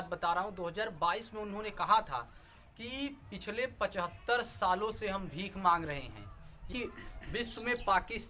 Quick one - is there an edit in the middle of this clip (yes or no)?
yes